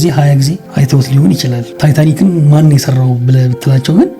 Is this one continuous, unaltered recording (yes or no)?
no